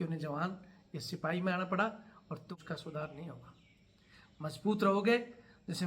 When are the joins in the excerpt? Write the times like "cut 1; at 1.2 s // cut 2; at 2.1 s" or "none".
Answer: cut 1; at 2.5 s